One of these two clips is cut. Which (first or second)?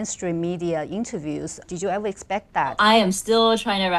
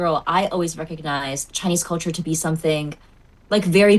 first